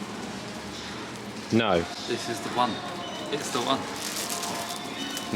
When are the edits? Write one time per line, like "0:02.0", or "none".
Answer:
none